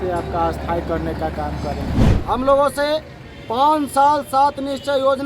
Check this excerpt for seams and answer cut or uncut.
cut